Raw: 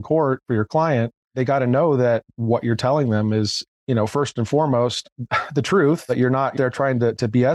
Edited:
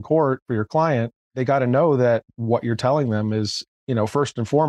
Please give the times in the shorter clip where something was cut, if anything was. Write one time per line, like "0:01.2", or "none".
none